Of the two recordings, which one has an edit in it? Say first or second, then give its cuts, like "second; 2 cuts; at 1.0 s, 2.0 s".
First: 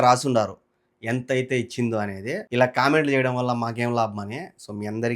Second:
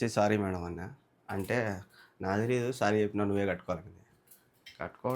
first; 1 cut; at 2.4 s